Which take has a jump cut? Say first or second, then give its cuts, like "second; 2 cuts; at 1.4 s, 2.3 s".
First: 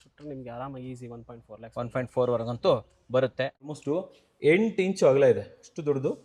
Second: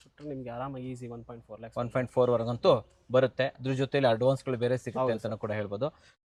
first; 1 cut; at 3.6 s